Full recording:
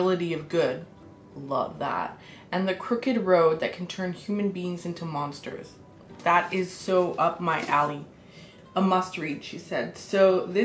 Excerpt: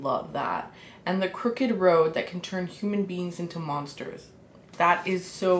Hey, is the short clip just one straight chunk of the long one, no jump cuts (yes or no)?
yes